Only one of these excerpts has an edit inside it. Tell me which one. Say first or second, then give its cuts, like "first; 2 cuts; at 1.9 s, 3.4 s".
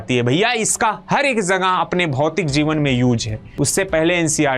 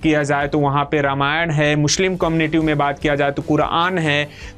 first; 1 cut; at 3.5 s